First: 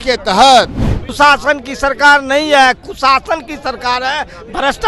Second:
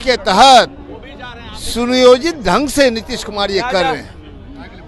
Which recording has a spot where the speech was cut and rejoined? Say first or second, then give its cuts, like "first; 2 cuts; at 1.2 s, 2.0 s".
first; 1 cut; at 1.1 s